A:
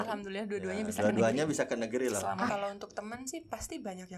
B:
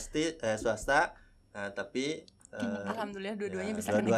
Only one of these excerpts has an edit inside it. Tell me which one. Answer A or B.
A